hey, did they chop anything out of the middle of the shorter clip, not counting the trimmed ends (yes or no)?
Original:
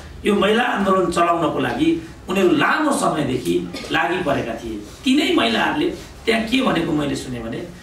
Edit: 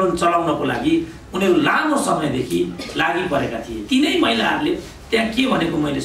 yes